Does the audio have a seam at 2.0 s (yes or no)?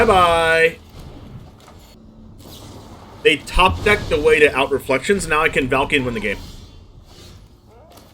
yes